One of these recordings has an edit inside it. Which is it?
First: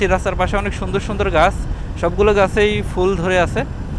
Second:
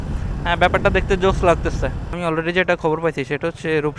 second; 1 cut; at 2.1 s

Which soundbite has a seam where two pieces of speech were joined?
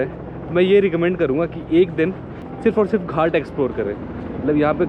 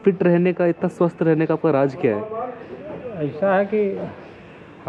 first; 1 cut; at 2.4 s

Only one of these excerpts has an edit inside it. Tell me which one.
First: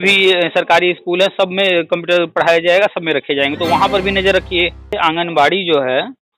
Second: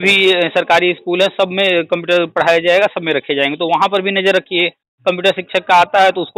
first; 1 cut; at 5.0 s

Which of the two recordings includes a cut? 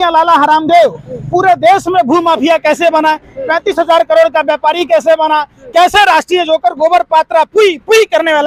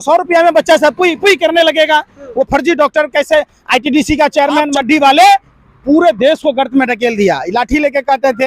second; 1 cut; at 4.7 s

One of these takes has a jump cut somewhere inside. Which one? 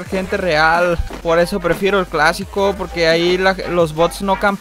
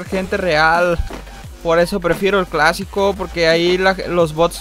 first; 1 cut; at 1.1 s

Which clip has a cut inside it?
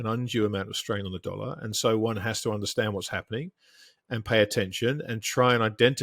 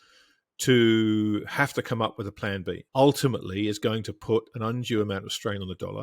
second; 1 cut; at 2.8 s

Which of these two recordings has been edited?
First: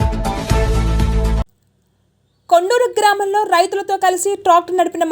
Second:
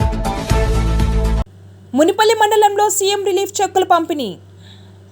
first; 1 cut; at 1.2 s

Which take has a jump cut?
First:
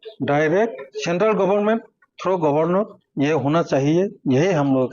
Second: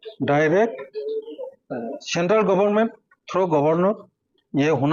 first; 2 cuts; at 0.9 s, 3.0 s

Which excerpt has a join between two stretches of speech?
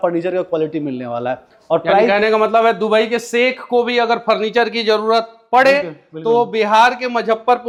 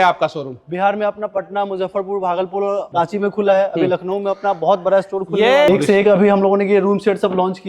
second; 2 cuts; at 2.9 s, 5.7 s

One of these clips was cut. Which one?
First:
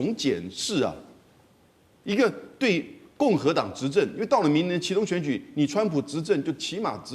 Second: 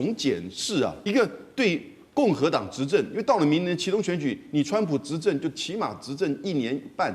second; 1 cut; at 1.0 s

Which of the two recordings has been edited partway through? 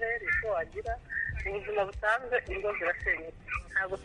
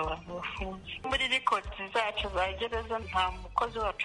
second; 2 cuts; at 1.1 s, 3.0 s

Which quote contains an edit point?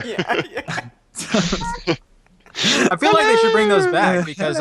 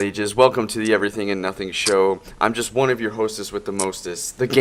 first; 1 cut; at 1.4 s

